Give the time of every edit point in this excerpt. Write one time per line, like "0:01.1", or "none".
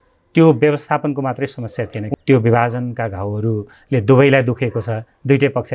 0:02.1

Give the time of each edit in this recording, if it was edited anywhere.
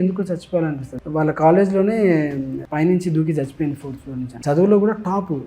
0:00.9
0:04.4

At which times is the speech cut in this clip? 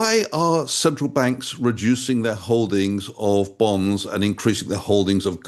none

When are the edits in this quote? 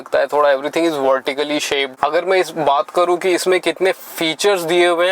0:02.0

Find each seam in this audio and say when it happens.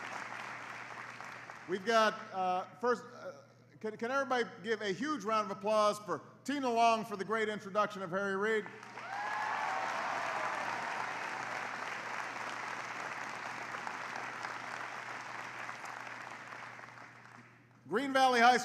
0:15.0

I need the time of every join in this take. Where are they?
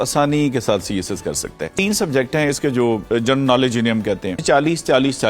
0:01.7
0:04.4

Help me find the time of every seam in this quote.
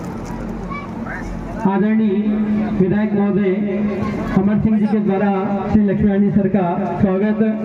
none

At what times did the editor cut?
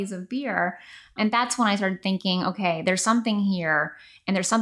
0:01.1

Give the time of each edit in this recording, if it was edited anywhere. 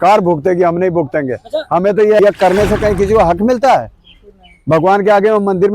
0:02.2

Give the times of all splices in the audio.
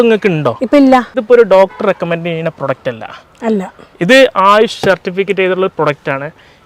0:01.2

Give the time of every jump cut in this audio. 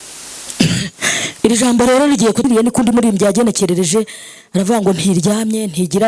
0:02.4

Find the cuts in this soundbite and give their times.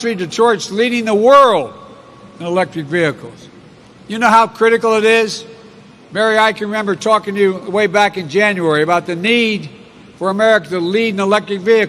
0:03.6

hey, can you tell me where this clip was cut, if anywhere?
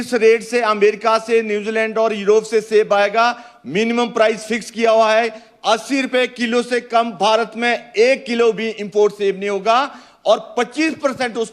none

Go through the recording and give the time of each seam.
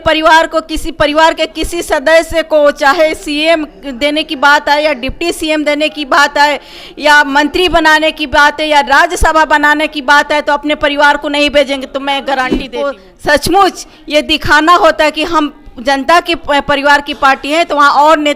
0:12.7

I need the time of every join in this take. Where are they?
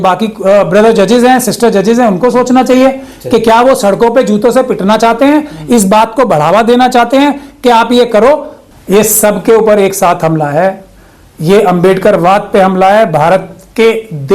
0:08.6

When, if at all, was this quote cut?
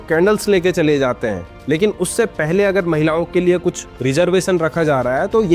0:02.3

